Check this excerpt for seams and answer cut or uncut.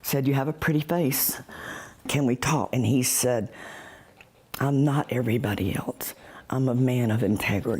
cut